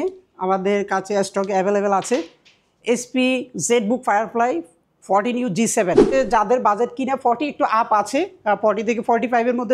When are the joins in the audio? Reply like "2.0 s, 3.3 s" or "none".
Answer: 6.1 s